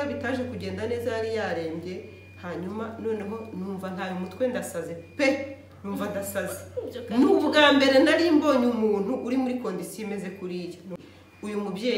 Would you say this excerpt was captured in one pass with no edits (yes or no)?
no